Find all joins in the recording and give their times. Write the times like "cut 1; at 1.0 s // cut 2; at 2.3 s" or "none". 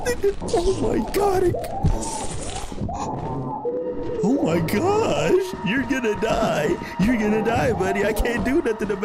none